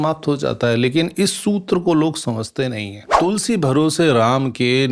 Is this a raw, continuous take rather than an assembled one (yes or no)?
no